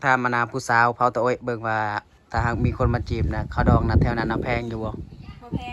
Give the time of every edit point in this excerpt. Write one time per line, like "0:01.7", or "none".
0:02.1